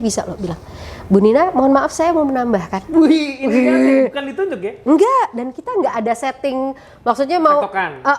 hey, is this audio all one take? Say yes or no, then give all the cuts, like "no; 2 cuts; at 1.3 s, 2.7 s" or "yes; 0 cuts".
yes; 0 cuts